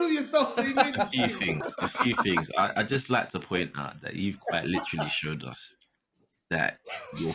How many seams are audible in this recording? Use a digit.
0